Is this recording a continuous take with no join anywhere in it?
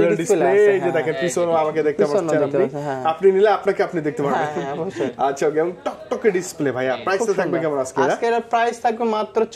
yes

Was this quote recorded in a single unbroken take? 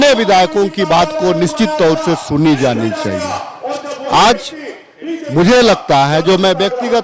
yes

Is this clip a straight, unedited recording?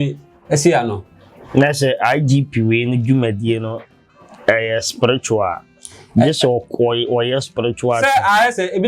yes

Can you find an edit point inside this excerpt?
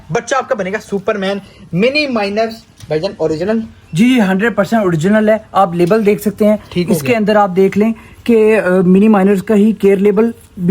no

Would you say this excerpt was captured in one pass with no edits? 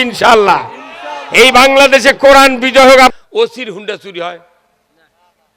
no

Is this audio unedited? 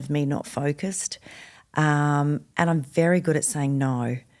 yes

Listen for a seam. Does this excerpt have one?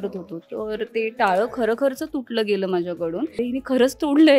yes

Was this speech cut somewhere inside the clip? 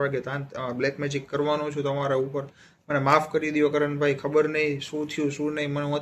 no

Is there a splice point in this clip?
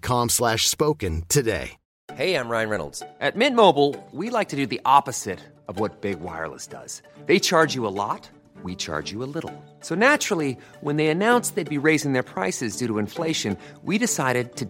yes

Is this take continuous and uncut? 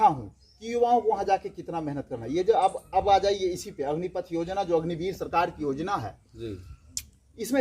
yes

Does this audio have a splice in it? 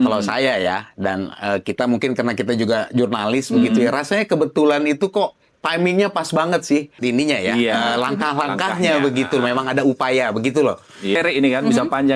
yes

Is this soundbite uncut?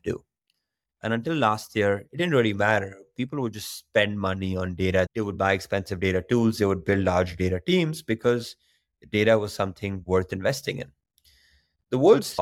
no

